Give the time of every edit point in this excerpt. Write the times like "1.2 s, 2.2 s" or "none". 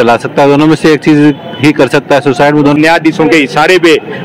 2.8 s